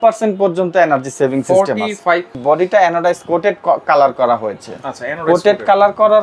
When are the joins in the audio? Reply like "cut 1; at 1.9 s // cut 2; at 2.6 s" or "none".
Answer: cut 1; at 2.3 s